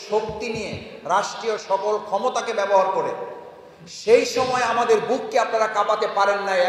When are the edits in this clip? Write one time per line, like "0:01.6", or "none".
none